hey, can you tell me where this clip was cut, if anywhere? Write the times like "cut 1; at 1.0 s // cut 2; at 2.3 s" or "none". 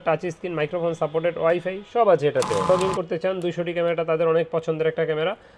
cut 1; at 2.7 s